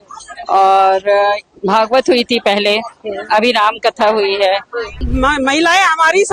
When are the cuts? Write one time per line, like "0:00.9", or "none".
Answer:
0:05.1